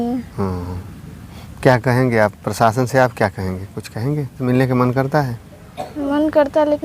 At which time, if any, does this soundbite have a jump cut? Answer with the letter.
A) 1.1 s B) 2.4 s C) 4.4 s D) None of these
C